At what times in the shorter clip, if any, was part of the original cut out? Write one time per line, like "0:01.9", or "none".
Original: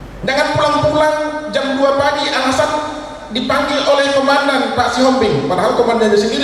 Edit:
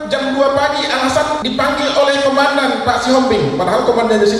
0:01.4